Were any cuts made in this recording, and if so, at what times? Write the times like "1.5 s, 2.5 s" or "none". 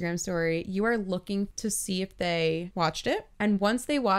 1.5 s, 2.7 s